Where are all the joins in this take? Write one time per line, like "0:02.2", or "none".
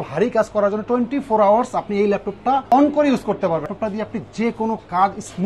0:02.6
0:03.7